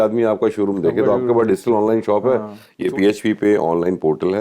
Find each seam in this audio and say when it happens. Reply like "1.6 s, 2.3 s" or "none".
2.7 s